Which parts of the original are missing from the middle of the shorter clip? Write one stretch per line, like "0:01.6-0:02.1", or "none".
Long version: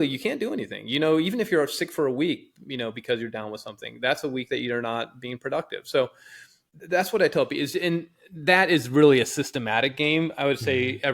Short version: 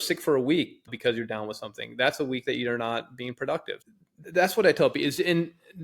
0:02.6-0:03.0
0:05.8-0:06.3